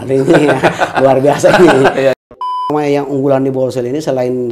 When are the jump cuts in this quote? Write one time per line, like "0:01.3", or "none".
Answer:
0:02.2